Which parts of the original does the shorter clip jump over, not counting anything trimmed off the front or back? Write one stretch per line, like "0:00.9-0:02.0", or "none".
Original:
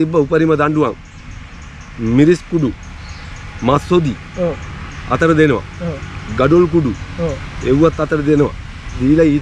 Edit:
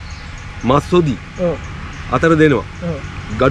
none